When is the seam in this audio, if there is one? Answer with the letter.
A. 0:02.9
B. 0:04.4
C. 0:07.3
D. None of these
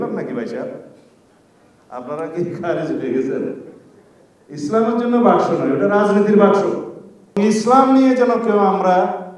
C